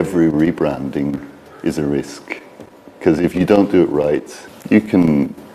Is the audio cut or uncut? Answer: uncut